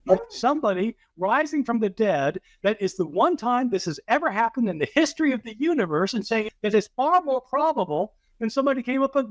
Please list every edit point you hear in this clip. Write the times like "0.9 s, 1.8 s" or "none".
6.2 s